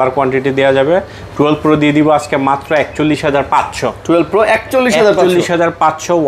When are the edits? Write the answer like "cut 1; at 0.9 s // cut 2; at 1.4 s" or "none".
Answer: none